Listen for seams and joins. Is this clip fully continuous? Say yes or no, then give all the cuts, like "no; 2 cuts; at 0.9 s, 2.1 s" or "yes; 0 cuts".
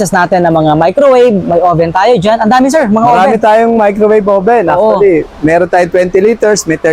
yes; 0 cuts